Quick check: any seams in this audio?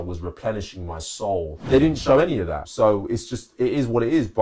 yes; 2 cuts; at 1.6 s, 2.7 s

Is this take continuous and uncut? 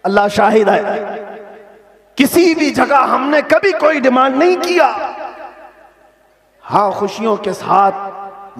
yes; 0 cuts

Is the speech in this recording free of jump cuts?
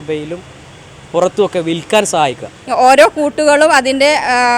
no; 1 cut; at 2.5 s

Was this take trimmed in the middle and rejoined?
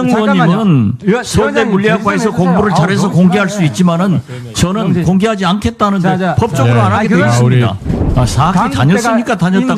yes; 1 cut; at 8.0 s

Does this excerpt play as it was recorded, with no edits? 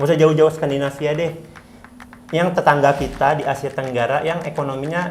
yes; 0 cuts

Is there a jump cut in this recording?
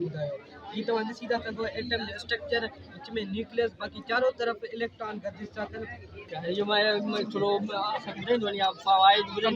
yes; 1 cut; at 6.3 s

